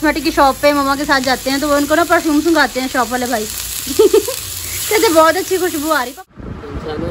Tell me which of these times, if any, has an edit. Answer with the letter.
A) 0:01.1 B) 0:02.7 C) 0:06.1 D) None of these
C